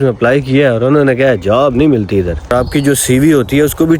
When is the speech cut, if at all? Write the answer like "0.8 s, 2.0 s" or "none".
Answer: 2.5 s